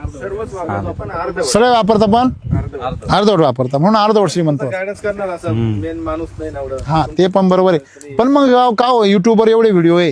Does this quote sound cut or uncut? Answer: uncut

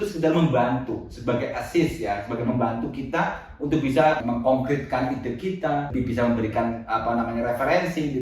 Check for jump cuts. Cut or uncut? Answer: cut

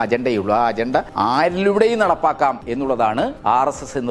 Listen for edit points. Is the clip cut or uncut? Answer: cut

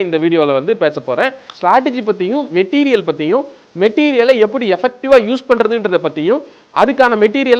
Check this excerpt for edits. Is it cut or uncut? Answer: uncut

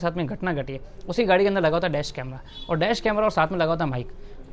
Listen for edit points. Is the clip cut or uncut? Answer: uncut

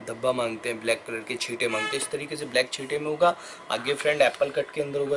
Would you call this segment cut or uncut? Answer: uncut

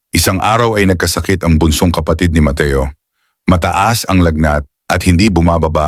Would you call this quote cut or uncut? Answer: uncut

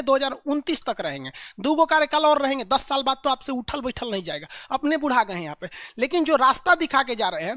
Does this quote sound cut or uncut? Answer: uncut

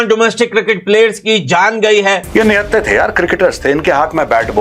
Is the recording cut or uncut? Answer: cut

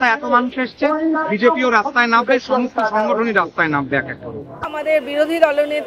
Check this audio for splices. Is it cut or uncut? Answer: cut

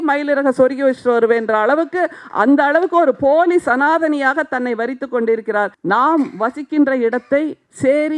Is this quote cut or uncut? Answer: cut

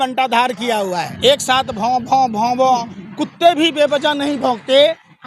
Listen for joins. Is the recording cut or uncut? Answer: cut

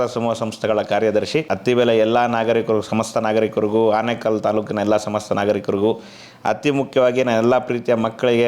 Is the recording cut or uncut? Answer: cut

